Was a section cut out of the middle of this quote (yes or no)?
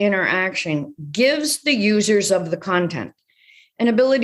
yes